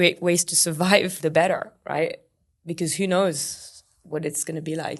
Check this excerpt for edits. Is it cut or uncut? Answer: cut